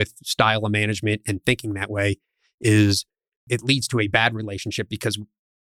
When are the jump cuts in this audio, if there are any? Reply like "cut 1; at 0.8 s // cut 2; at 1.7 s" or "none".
cut 1; at 3.5 s

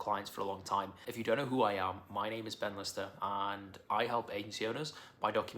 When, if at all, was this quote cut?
cut 1; at 1.1 s

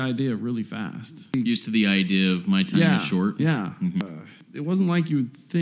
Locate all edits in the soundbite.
cut 1; at 1.3 s // cut 2; at 4.0 s

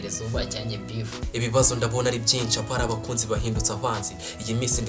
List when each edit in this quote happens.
cut 1; at 1.2 s

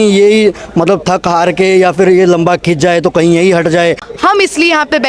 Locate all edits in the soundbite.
cut 1; at 4.1 s

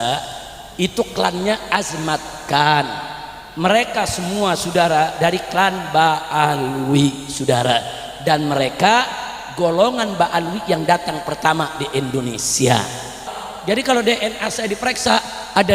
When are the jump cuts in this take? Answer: cut 1; at 13.4 s

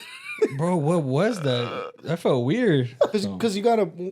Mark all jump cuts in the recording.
cut 1; at 3.1 s

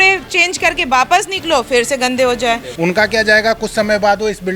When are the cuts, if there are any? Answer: cut 1; at 2.7 s

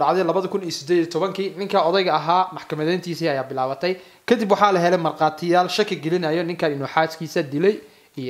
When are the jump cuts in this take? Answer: none

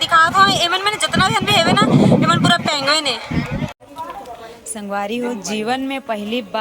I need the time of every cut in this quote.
cut 1; at 3.7 s

